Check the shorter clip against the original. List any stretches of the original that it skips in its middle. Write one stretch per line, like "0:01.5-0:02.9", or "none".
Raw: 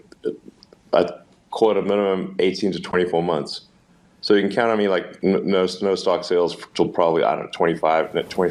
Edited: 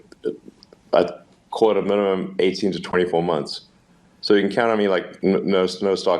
none